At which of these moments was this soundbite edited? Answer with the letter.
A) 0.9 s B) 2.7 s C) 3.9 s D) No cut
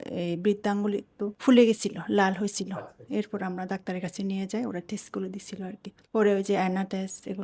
D